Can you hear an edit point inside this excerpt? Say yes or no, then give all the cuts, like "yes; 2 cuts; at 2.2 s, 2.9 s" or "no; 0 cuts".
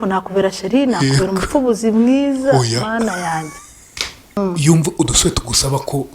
yes; 1 cut; at 4.4 s